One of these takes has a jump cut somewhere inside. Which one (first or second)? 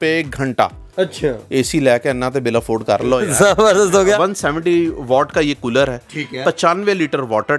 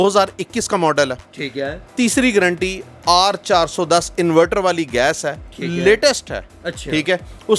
first